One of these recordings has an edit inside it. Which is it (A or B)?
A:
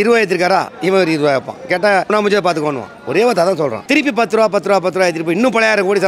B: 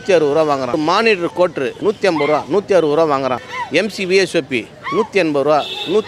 A